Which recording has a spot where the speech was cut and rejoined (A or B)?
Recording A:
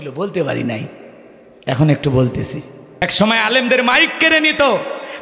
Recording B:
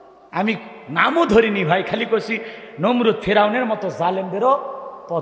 A